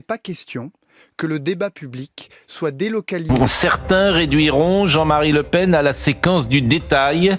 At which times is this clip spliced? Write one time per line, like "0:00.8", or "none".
0:03.2